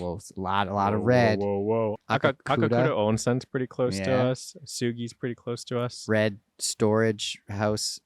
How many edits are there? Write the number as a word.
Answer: one